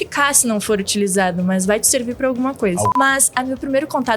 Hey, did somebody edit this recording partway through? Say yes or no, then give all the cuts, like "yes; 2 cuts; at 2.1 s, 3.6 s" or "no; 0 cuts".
yes; 1 cut; at 2.9 s